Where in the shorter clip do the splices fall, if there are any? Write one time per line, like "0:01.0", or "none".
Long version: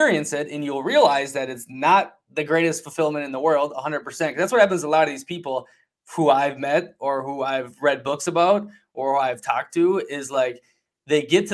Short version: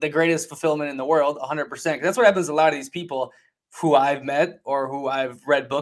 none